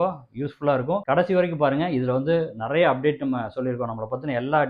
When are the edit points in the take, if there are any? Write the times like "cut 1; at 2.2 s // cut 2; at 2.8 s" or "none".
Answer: cut 1; at 1.0 s